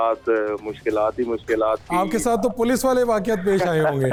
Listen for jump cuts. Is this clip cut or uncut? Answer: uncut